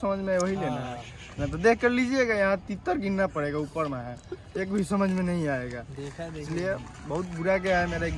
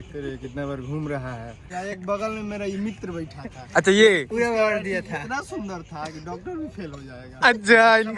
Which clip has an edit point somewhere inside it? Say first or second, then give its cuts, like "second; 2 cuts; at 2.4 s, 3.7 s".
second; 1 cut; at 1.7 s